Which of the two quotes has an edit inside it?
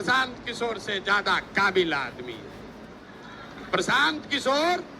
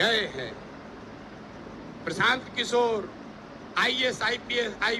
first; 1 cut; at 3.1 s

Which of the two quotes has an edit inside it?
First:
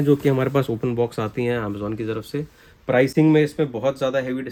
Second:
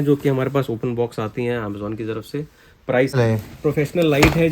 second; 1 cut; at 3.1 s

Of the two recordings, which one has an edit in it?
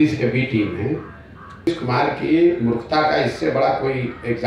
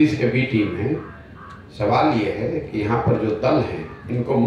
first; 1 cut; at 1.7 s

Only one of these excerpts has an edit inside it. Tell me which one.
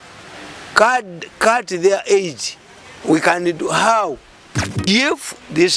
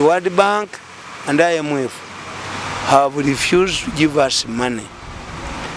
first; 1 cut; at 4.9 s

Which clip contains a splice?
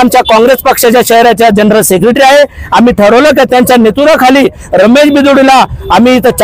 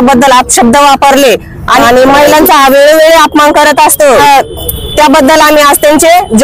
second; 2 cuts; at 1.8 s, 4.2 s

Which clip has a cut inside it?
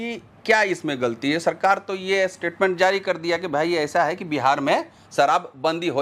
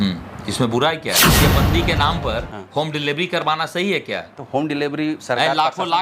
second; 1 cut; at 1.4 s

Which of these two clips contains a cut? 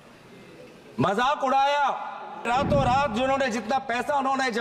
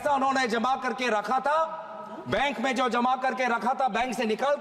first; 1 cut; at 2.5 s

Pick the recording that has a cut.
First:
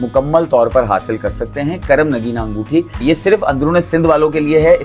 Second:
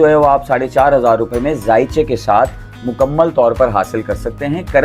first; 1 cut; at 3.0 s

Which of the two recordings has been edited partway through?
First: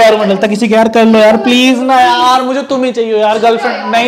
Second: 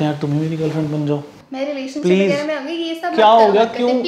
second; 1 cut; at 1.3 s

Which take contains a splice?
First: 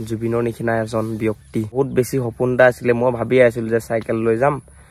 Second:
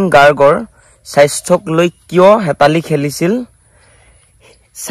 first; 1 cut; at 1.7 s

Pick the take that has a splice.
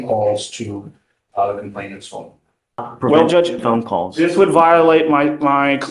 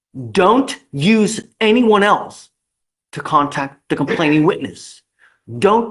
first; 1 cut; at 2.9 s

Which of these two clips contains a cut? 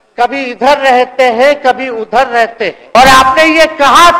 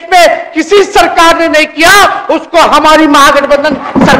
first; 1 cut; at 2.9 s

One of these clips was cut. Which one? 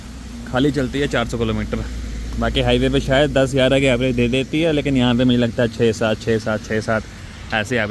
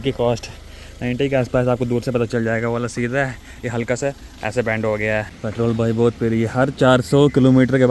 second; 1 cut; at 5.3 s

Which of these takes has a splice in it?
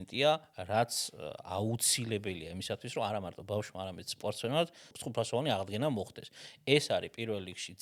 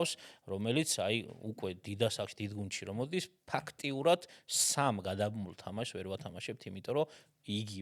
first; 1 cut; at 5.0 s

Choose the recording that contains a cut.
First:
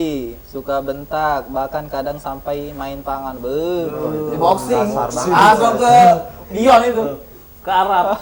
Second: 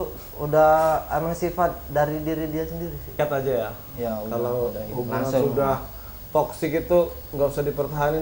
second; 1 cut; at 3.1 s

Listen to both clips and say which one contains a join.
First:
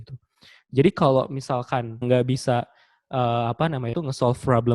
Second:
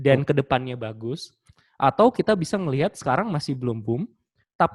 first; 1 cut; at 2.0 s

